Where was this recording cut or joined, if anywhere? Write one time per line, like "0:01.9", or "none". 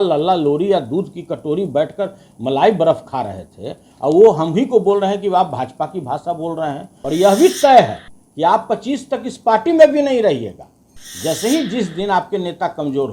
0:06.9

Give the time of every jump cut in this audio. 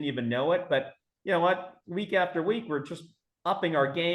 none

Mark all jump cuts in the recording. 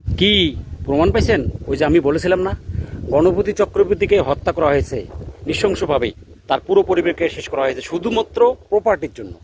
none

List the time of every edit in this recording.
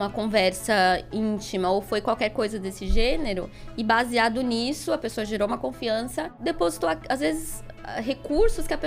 0:06.3

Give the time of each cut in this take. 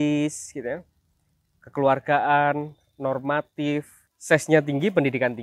0:04.1

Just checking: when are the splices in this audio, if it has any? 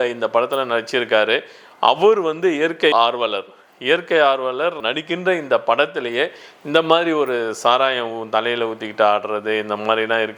none

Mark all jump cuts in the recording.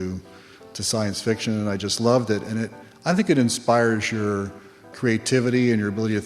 0:04.9

